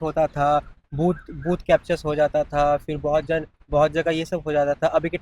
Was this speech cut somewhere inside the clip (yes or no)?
no